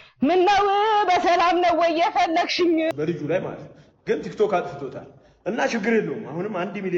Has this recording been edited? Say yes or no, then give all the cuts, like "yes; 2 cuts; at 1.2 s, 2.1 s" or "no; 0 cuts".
yes; 1 cut; at 2.9 s